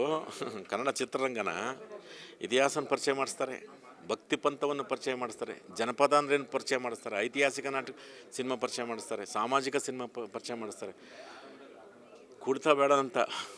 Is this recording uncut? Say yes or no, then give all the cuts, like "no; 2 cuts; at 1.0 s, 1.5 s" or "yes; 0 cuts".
yes; 0 cuts